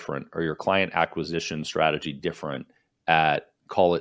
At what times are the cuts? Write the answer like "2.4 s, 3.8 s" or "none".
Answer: none